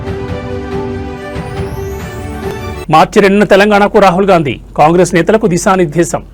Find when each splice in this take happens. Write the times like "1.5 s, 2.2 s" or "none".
none